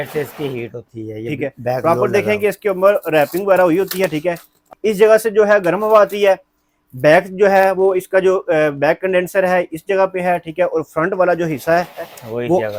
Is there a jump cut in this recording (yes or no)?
no